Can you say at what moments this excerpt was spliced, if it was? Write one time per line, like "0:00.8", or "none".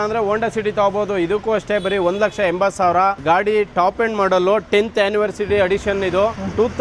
none